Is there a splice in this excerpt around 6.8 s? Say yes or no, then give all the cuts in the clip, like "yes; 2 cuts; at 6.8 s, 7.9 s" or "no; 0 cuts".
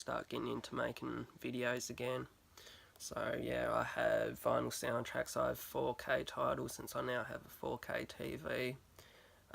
yes; 1 cut; at 6.8 s